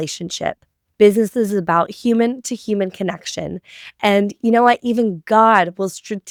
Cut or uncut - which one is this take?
uncut